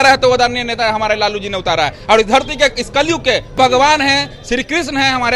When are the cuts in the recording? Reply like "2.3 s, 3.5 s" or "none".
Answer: 3.6 s